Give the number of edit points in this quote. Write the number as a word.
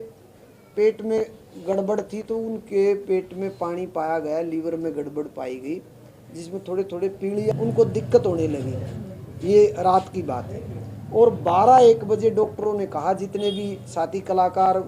one